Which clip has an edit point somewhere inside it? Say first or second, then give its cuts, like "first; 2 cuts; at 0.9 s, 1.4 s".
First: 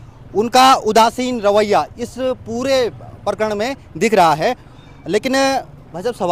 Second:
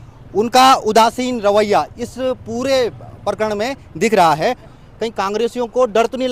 second; 1 cut; at 4.8 s